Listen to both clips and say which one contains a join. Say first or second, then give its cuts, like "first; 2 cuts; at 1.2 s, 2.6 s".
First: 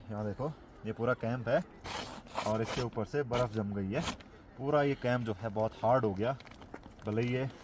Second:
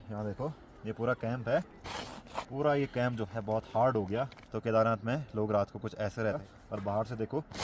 second; 3 cuts; at 2.3 s, 4.4 s, 6.4 s